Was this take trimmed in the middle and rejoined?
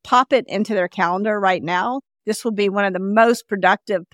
yes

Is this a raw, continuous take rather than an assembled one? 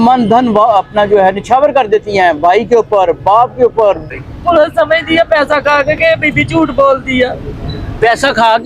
no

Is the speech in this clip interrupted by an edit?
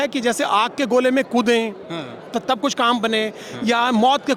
no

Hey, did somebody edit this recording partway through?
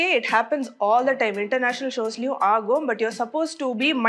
no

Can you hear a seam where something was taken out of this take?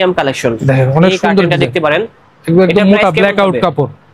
no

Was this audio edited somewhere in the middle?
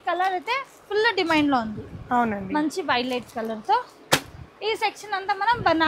no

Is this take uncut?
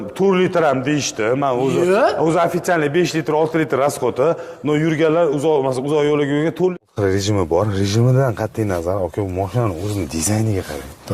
no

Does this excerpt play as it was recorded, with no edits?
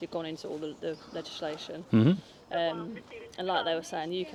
yes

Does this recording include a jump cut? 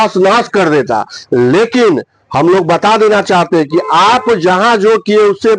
no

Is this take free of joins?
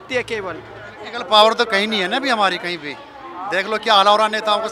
no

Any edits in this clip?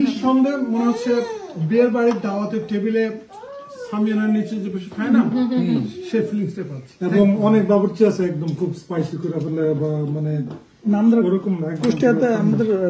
no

